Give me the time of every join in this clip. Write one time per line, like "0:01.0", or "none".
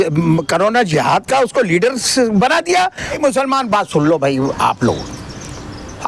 0:03.1

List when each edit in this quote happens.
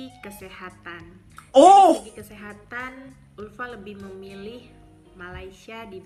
none

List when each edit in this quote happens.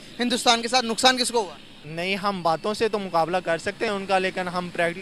none

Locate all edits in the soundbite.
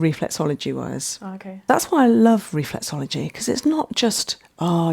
0:01.6

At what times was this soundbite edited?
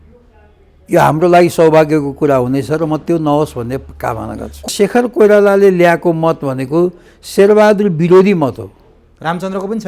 0:04.7

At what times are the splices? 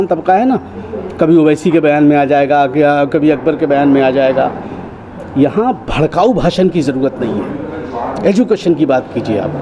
none

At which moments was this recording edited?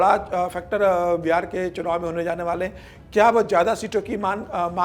none

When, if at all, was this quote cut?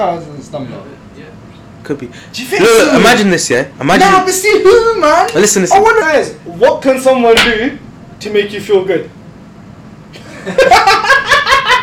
0:06.0

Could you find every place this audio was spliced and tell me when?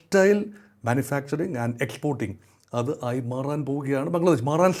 none

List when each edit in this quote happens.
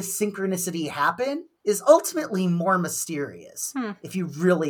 none

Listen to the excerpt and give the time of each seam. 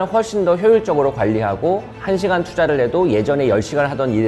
none

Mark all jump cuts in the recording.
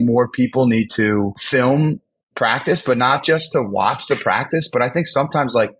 0:01.4

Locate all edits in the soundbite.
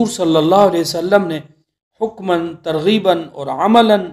none

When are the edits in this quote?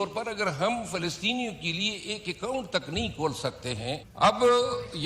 0:04.1

